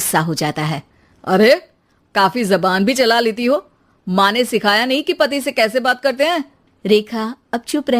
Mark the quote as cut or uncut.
uncut